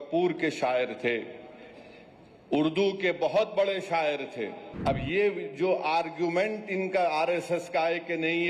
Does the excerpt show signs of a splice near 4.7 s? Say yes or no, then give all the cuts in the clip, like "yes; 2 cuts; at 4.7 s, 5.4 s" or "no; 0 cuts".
yes; 1 cut; at 4.7 s